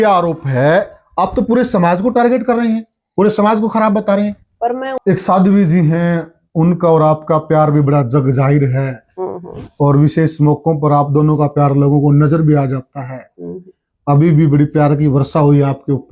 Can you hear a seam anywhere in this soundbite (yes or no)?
yes